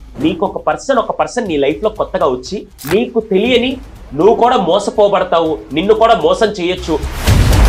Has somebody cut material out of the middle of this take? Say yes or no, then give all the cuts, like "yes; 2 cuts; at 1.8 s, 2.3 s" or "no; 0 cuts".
no; 0 cuts